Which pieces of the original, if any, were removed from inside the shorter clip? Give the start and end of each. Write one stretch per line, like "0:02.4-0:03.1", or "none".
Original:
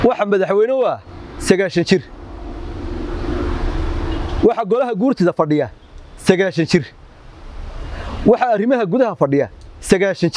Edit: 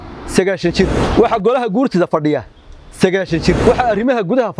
0:02.1-0:04.3
0:06.9-0:08.3